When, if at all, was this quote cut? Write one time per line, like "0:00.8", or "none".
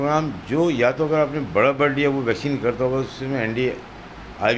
none